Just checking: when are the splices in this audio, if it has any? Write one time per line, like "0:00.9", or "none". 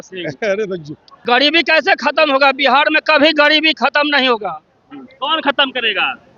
0:01.1